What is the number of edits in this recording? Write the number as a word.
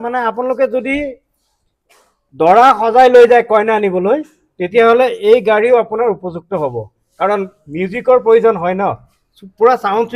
zero